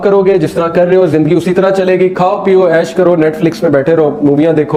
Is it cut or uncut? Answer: uncut